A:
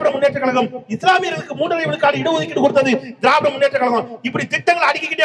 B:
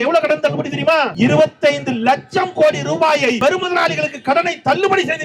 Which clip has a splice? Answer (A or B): B